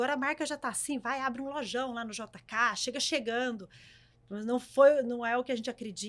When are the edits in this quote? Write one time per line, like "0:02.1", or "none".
none